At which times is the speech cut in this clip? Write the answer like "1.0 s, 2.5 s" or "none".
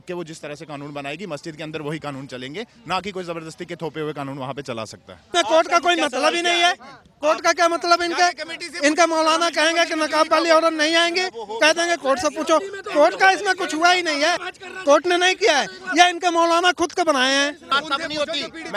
5.3 s, 14.4 s, 17.8 s